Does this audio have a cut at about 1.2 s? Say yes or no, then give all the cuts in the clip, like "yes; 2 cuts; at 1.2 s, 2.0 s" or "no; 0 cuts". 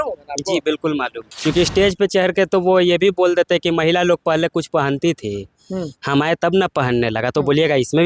yes; 1 cut; at 1.2 s